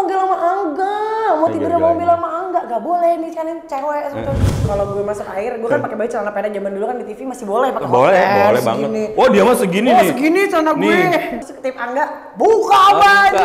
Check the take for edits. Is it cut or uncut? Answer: cut